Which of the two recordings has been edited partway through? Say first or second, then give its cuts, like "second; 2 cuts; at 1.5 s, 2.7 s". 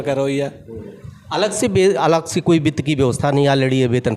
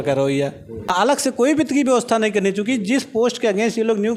second; 1 cut; at 0.9 s